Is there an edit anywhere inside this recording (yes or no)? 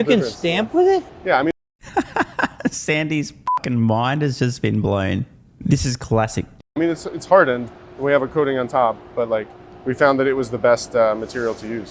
no